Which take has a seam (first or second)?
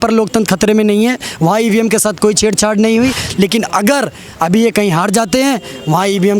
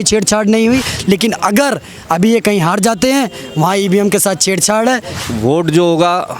second